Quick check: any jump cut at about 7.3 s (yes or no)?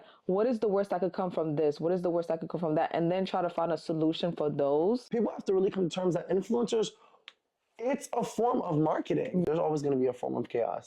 no